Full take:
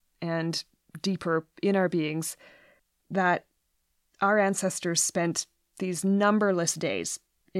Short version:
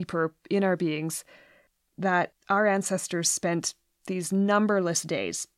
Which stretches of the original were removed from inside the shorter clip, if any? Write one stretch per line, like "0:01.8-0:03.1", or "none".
0:03.5-0:04.1